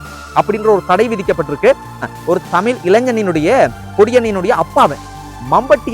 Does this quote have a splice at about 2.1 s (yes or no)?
yes